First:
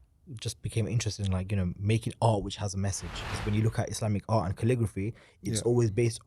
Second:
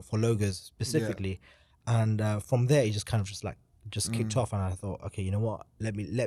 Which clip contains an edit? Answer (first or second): first